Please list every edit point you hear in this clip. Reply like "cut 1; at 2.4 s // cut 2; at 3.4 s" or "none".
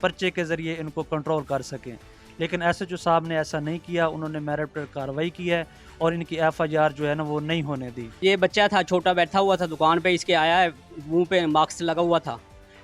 cut 1; at 8.2 s